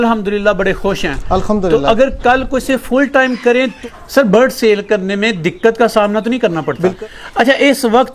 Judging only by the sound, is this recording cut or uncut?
cut